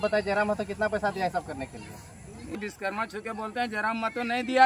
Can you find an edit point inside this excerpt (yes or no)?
yes